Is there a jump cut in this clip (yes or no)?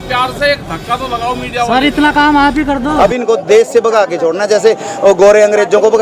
yes